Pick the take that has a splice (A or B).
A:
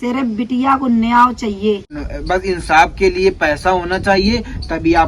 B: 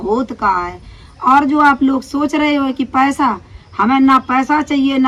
A